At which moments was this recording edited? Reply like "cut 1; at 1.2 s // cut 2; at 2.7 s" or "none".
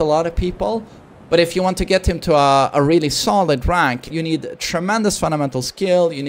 cut 1; at 4.1 s